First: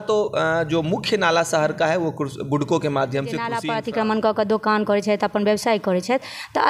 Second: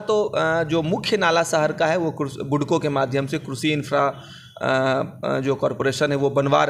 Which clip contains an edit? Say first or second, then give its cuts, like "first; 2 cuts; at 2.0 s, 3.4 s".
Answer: first; 1 cut; at 3.7 s